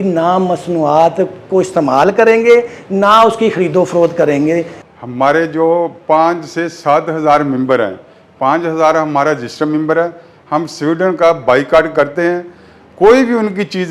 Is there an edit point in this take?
no; 0 cuts

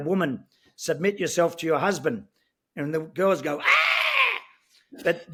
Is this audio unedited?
yes; 0 cuts

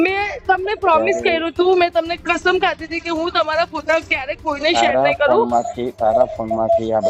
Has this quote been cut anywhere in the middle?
no; 0 cuts

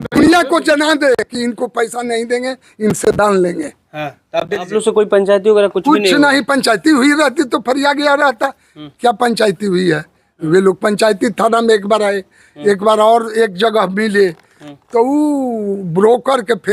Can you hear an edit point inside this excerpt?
yes; 1 cut; at 4.7 s

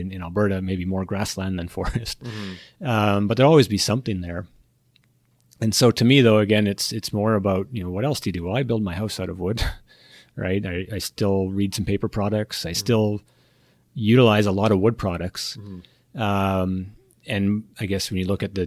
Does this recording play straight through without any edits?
yes; 0 cuts

